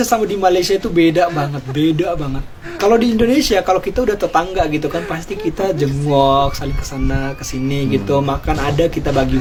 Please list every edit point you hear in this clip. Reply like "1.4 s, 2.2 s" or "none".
none